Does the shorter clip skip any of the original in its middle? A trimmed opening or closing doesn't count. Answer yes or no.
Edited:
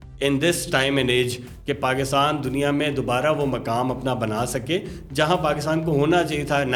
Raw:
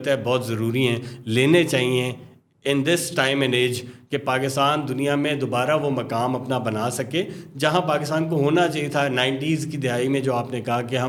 no